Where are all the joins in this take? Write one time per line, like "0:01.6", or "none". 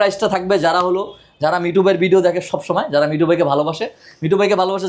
none